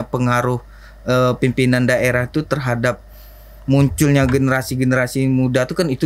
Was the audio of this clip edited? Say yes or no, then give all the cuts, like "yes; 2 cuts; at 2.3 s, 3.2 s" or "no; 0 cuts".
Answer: no; 0 cuts